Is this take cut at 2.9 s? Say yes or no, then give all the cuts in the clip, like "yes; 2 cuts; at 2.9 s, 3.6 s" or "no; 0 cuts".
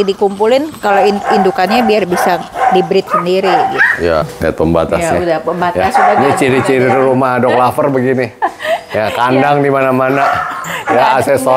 no; 1 cut; at 4.3 s